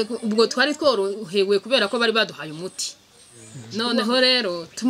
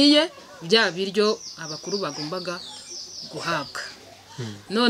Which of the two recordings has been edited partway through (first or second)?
first